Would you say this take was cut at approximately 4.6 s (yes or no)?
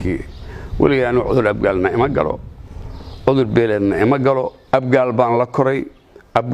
yes